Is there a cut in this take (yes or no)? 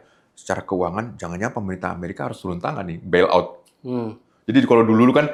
no